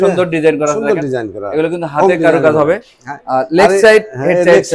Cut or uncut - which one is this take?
uncut